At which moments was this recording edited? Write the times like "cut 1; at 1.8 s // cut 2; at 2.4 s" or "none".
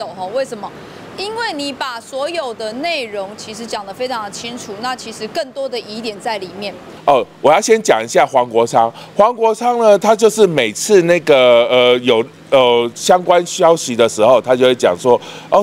cut 1; at 6.9 s